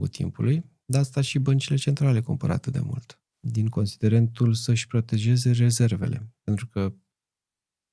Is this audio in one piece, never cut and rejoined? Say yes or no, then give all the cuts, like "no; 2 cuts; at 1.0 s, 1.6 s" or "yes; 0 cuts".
yes; 0 cuts